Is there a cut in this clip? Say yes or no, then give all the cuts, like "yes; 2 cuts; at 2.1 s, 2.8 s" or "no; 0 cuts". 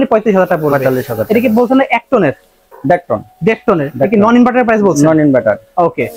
no; 0 cuts